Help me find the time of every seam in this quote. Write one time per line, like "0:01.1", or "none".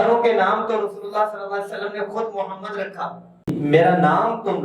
0:03.5